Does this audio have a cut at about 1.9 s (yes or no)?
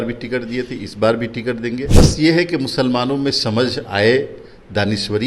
yes